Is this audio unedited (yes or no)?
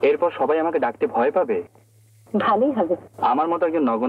no